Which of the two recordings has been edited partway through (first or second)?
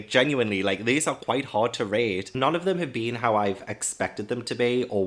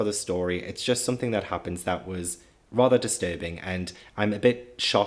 first